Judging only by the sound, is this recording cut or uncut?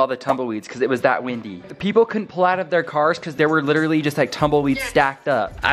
uncut